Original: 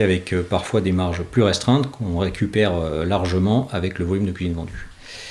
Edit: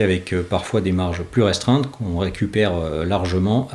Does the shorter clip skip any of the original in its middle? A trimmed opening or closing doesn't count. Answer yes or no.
no